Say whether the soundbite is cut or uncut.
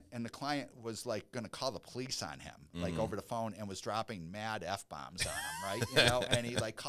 uncut